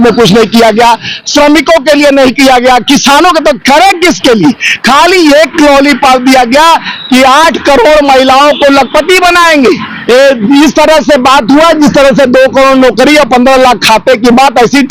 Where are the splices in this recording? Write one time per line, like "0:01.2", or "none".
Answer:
none